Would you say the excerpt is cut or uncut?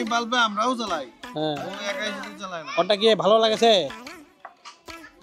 uncut